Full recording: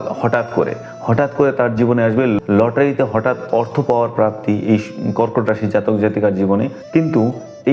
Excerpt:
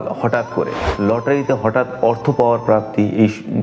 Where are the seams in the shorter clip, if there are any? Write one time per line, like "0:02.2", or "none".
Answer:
0:00.9